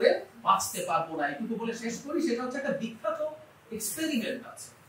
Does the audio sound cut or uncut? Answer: uncut